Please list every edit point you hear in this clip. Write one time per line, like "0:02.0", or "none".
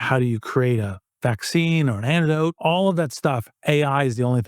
0:02.6